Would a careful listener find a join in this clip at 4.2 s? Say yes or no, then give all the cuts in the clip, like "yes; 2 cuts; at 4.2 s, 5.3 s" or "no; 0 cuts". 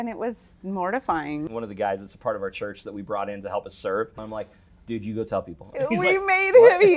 yes; 2 cuts; at 1.5 s, 4.2 s